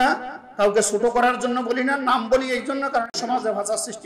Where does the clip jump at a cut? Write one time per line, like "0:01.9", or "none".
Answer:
0:03.2

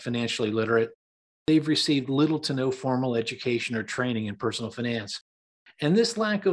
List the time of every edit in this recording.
none

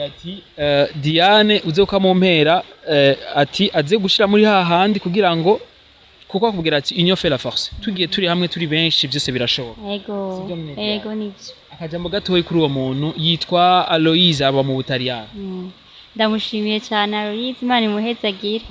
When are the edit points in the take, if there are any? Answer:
none

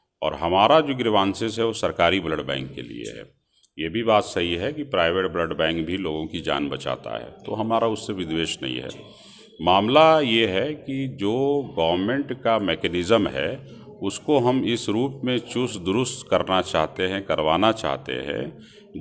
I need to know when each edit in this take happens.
none

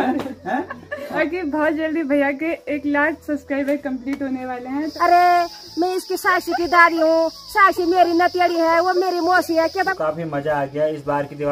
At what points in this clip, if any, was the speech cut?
0:01.2
0:04.9
0:09.9

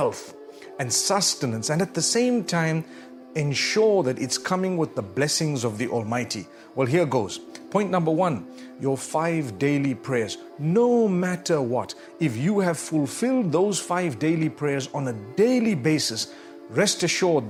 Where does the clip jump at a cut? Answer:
none

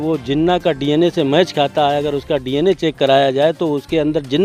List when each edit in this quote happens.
none

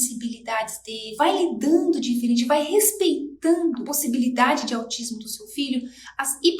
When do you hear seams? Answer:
0:01.0
0:03.9

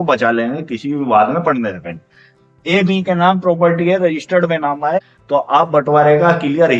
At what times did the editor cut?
0:05.0

